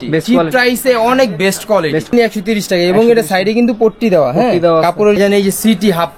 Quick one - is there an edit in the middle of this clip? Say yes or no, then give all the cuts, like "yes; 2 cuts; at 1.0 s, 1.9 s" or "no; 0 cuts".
yes; 2 cuts; at 2.1 s, 5.2 s